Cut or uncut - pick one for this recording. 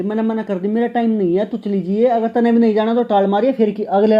uncut